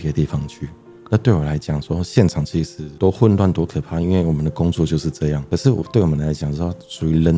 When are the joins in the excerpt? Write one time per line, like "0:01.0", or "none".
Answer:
none